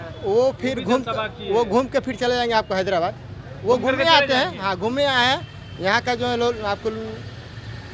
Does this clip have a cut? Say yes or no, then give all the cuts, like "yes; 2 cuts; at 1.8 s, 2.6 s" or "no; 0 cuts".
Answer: no; 0 cuts